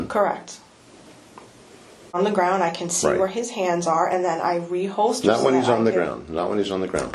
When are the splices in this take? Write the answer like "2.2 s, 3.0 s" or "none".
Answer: 2.2 s